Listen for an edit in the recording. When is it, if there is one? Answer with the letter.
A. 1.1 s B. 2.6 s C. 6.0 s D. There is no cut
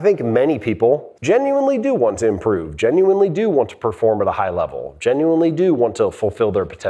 A